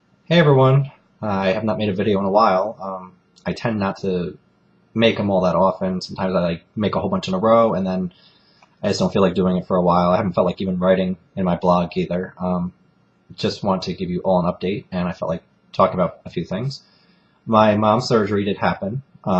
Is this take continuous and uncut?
yes; 0 cuts

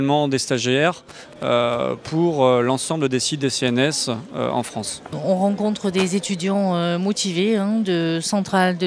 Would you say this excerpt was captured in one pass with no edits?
no; 1 cut; at 4.8 s

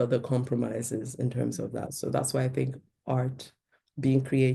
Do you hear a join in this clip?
no; 0 cuts

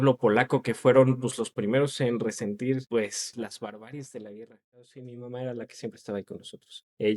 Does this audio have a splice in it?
yes; 1 cut; at 4.8 s

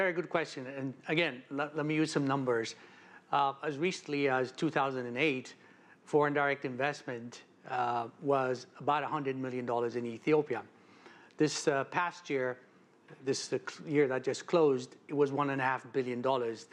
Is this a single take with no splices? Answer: yes; 0 cuts

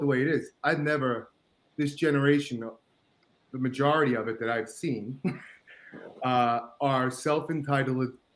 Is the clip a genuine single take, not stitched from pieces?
yes; 0 cuts

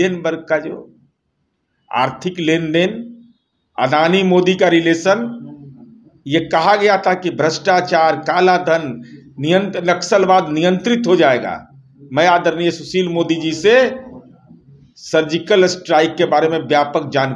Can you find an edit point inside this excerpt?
no; 0 cuts

